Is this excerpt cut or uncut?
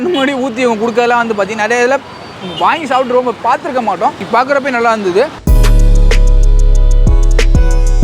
uncut